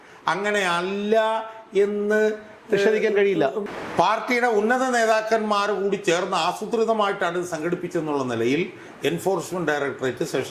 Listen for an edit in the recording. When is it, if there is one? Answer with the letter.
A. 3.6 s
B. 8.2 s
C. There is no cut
A